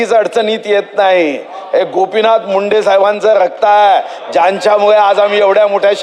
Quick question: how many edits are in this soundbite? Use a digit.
0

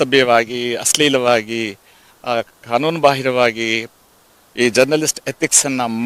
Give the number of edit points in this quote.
0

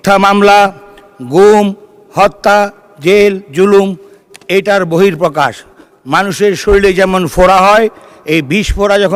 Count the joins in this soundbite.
0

